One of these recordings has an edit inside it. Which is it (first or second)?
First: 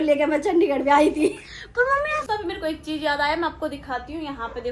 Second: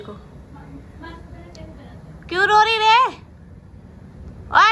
first